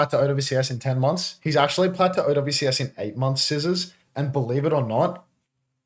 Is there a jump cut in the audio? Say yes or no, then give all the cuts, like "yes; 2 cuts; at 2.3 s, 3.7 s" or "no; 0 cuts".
no; 0 cuts